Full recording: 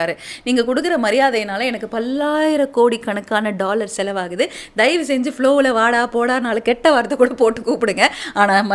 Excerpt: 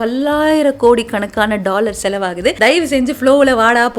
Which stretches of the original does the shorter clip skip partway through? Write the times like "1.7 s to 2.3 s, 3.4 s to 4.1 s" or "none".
4.5 s to 4.7 s